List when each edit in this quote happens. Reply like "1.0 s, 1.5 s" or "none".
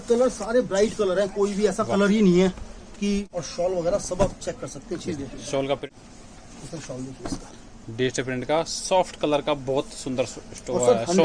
3.3 s, 5.9 s

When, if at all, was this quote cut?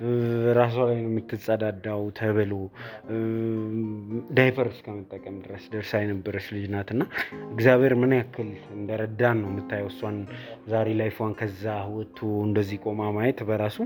none

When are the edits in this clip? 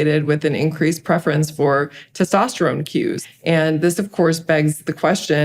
3.2 s

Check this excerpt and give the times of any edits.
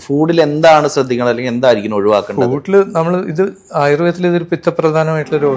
none

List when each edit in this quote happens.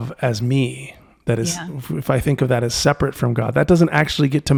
none

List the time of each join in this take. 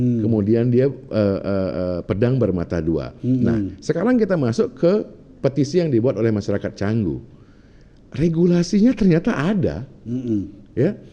none

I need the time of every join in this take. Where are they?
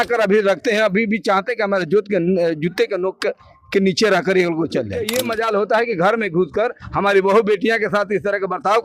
5.1 s

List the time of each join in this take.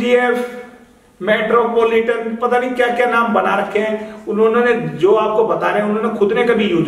none

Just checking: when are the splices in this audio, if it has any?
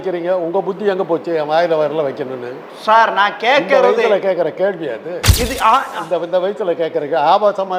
none

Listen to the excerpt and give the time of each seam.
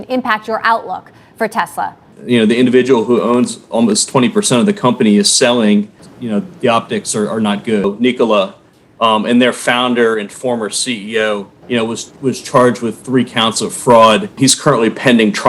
2.1 s, 6.0 s, 7.8 s, 11.5 s, 14.3 s

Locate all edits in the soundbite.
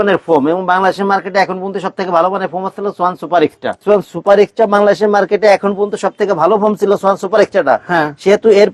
3.8 s

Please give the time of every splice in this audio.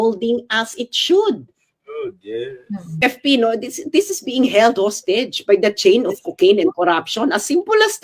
3.0 s

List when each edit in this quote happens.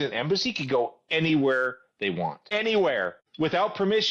2.4 s, 3.2 s

